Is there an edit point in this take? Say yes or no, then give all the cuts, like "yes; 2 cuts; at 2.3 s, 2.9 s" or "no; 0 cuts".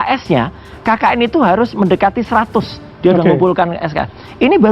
no; 0 cuts